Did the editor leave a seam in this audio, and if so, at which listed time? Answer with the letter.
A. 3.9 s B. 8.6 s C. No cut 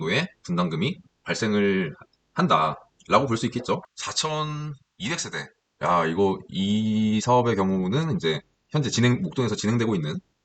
A